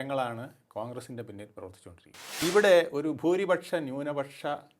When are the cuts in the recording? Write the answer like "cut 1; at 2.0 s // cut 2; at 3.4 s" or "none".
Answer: cut 1; at 2.3 s

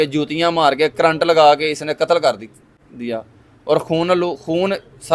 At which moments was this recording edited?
none

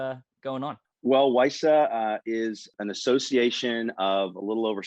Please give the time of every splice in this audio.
cut 1; at 0.9 s // cut 2; at 2.7 s

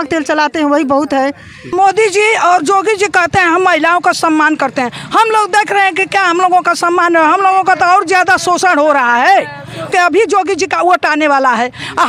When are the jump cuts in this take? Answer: cut 1; at 1.7 s // cut 2; at 9.9 s

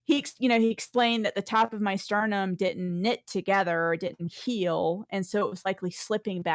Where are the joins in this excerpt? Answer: none

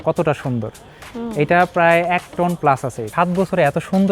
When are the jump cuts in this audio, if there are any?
cut 1; at 3.1 s

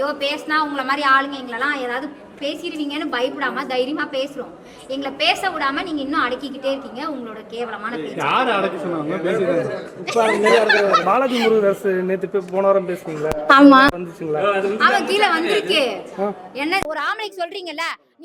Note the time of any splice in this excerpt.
cut 1; at 16.9 s

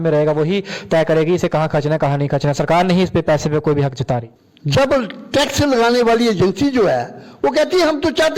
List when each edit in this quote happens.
cut 1; at 4.3 s

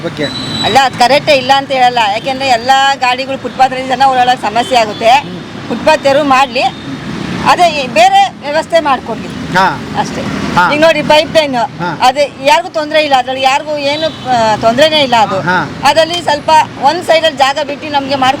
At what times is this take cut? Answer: none

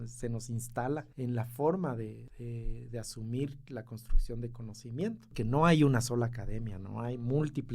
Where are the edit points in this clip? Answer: cut 1; at 1.1 s // cut 2; at 2.3 s // cut 3; at 5.3 s

